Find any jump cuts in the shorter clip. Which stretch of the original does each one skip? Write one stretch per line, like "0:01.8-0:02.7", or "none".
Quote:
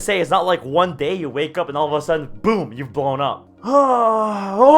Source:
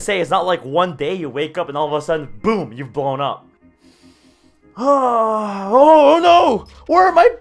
0:03.5-0:04.6